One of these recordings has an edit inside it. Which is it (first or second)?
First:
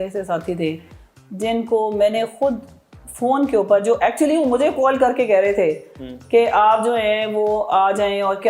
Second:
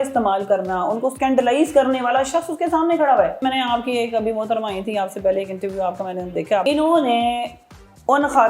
second